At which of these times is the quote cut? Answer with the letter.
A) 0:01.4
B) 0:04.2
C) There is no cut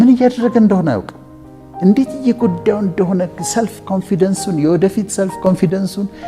C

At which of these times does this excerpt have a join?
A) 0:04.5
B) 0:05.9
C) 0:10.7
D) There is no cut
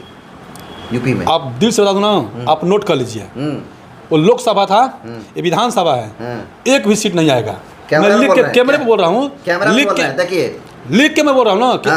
D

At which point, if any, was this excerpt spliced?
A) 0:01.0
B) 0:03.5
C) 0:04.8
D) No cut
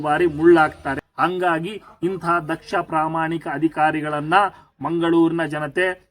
A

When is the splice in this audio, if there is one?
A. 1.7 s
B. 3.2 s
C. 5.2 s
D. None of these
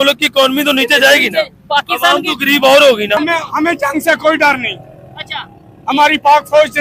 B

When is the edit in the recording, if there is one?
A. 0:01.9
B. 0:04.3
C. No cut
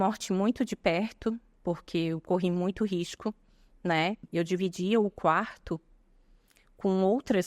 B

